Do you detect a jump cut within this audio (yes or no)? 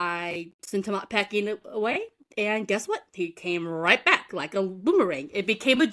no